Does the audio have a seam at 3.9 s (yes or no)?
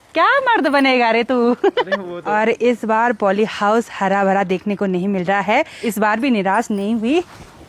no